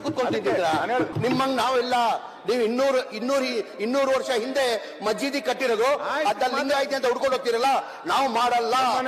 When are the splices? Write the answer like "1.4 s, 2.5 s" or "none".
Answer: 1.1 s